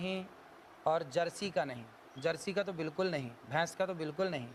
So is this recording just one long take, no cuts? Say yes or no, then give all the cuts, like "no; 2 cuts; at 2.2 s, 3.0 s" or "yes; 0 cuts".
yes; 0 cuts